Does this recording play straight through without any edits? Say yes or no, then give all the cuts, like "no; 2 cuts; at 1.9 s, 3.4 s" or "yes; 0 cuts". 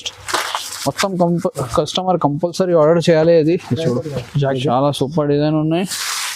no; 1 cut; at 4.5 s